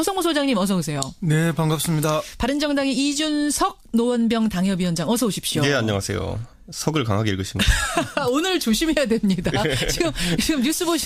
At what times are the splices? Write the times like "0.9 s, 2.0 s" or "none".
none